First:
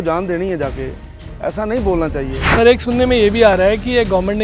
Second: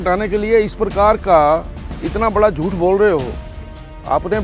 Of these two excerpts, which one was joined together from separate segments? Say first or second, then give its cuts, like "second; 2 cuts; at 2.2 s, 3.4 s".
first; 1 cut; at 2.4 s